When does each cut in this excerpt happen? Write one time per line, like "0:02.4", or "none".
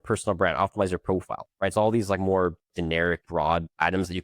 0:01.4
0:03.5